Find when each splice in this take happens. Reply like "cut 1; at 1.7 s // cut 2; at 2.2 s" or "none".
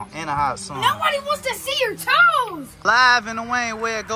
cut 1; at 2.7 s